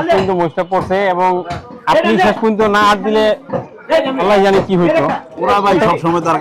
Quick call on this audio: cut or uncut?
uncut